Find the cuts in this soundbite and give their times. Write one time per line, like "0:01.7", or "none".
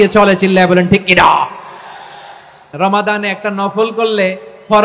0:02.7